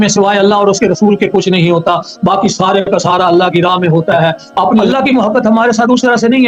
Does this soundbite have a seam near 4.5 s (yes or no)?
yes